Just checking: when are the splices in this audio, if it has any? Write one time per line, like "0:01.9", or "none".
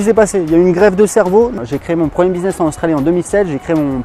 0:01.6